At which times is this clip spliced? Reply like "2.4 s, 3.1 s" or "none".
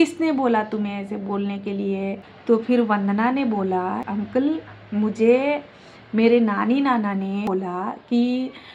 2.3 s, 4.1 s, 7.9 s